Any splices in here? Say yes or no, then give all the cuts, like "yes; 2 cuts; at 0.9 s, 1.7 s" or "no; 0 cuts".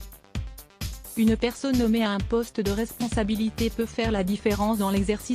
yes; 1 cut; at 1.1 s